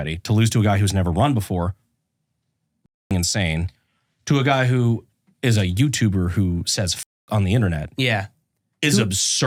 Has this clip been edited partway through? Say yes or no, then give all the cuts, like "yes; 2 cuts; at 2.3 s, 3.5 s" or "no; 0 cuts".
no; 0 cuts